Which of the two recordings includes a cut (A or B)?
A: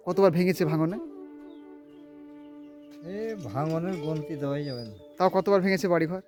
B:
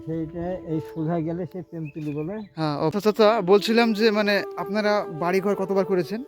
B